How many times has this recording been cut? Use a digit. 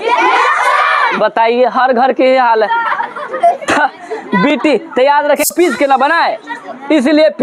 1